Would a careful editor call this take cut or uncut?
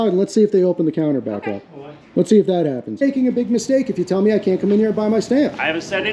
cut